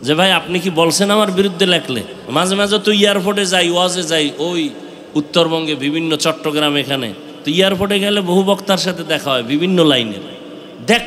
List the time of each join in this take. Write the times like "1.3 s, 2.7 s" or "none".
2.1 s